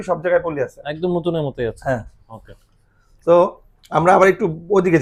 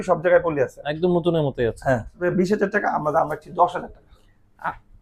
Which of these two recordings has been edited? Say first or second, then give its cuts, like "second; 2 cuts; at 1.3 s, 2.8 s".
second; 1 cut; at 2.2 s